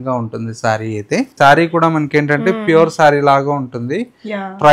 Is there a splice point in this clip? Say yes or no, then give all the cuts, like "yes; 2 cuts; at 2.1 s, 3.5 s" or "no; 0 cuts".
yes; 1 cut; at 1.3 s